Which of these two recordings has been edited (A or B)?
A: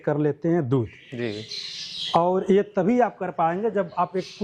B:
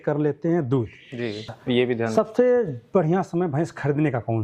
B